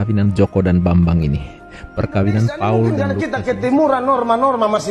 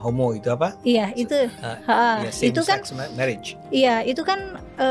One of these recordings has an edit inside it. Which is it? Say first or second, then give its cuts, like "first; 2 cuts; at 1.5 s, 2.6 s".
first; 1 cut; at 3.1 s